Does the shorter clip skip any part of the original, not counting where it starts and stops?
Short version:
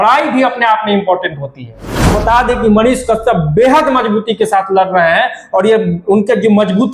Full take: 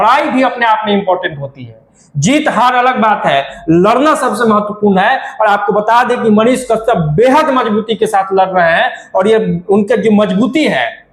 yes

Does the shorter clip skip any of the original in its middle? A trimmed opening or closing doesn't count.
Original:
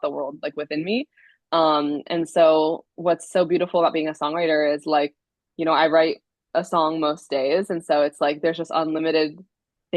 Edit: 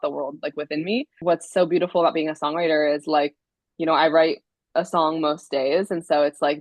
yes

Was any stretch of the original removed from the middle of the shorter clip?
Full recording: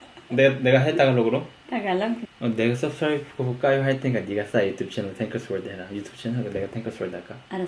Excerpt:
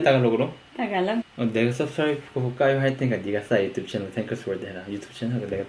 yes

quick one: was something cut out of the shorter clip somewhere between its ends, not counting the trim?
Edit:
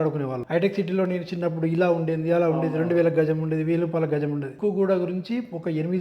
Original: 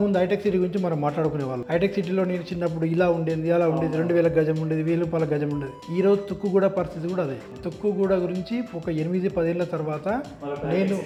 yes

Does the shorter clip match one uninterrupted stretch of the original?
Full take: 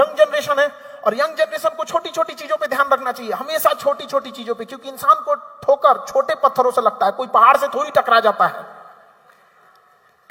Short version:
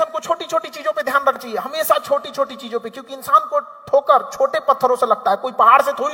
no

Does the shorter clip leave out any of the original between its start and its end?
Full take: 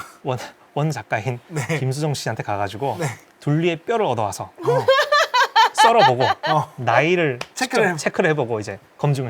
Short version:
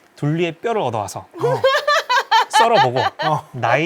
no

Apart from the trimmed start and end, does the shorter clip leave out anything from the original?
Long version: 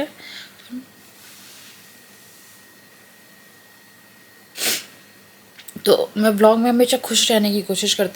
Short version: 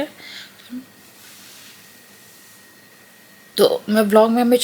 yes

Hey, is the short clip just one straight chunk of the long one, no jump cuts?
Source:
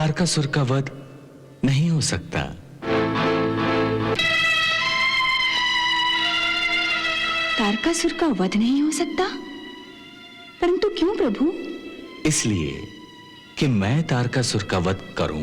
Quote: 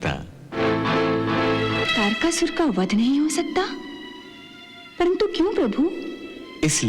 no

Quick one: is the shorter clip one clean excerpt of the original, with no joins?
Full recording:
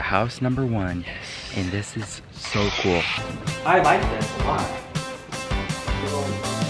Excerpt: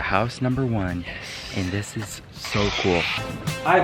yes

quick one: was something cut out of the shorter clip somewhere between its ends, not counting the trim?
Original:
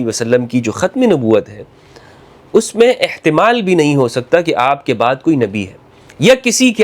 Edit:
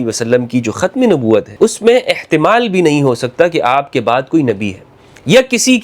yes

